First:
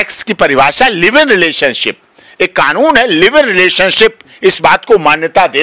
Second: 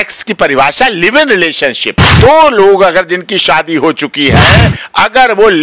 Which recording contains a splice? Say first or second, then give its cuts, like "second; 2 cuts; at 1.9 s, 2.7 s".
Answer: second; 1 cut; at 2.1 s